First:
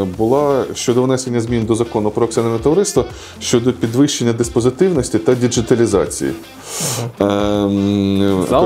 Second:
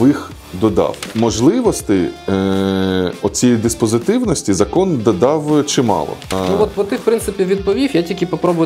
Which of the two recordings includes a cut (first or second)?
second